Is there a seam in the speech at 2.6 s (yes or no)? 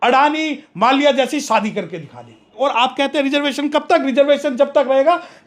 yes